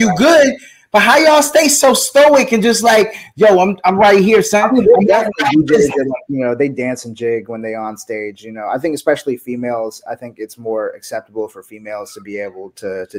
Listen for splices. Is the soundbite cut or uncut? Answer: uncut